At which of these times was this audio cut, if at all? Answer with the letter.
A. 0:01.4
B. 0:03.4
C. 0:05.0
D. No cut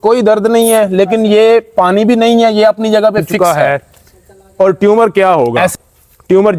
B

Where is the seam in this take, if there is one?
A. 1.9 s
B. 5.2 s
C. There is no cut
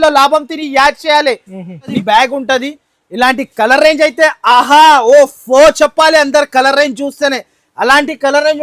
A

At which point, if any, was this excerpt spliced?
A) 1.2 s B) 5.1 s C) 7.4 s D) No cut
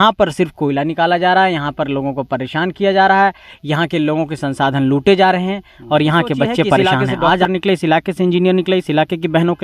C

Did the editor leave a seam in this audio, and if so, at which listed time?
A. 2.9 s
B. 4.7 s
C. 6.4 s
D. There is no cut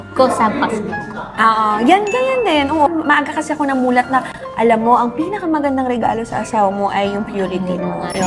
A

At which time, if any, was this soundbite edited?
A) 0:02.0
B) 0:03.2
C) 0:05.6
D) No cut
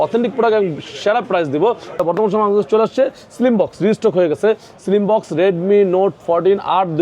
A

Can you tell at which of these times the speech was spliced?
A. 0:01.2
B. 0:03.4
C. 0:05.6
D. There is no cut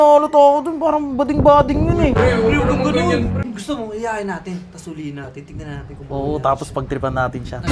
B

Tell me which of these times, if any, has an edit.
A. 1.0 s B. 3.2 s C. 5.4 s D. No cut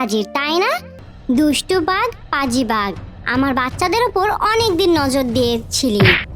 A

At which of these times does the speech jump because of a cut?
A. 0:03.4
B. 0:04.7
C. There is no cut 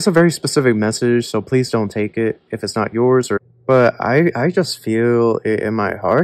A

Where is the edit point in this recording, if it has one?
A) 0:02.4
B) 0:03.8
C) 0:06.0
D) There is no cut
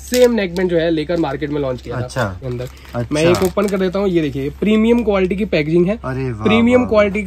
A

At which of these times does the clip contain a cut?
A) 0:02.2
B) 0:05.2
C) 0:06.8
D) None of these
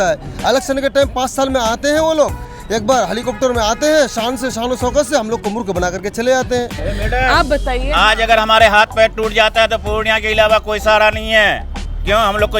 C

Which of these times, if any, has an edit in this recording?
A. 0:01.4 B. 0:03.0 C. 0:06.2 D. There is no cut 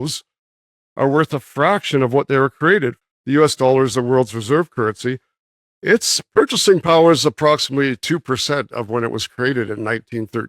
B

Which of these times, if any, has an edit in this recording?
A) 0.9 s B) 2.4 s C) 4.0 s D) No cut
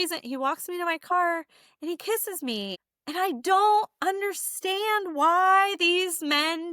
D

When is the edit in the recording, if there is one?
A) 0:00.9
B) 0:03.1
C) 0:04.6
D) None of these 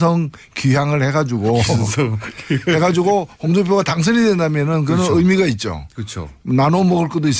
D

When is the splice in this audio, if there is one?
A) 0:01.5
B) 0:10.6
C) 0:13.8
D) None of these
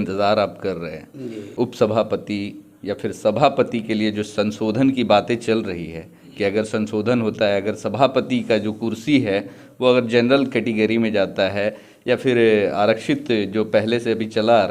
A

